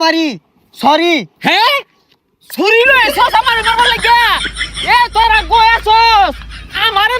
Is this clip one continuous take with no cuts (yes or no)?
yes